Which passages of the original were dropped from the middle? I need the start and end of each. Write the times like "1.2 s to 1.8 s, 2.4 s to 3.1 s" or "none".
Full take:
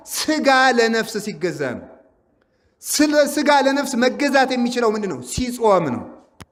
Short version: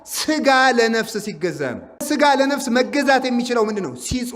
2.0 s to 3.3 s